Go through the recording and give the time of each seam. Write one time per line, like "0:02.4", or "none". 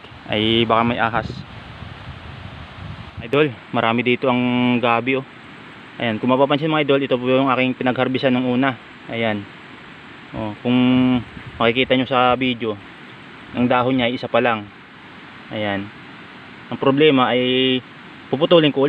0:03.3